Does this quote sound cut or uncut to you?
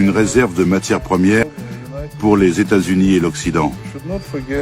cut